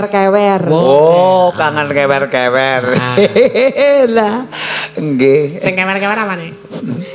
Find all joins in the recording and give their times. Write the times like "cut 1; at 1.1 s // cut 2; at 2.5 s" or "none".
none